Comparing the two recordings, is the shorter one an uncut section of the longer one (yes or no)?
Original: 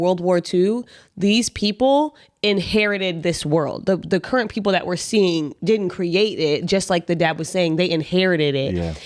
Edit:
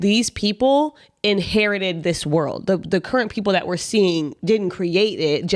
yes